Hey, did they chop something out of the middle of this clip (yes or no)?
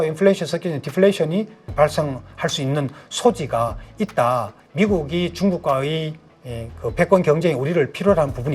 yes